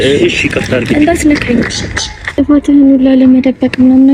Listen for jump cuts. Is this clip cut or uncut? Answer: cut